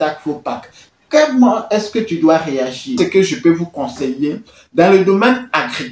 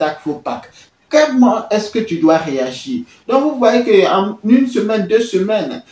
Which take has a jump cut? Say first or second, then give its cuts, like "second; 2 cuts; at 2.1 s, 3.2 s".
first; 1 cut; at 3.0 s